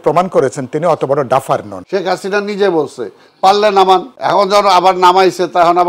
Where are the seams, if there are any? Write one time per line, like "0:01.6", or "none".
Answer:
0:01.7
0:04.1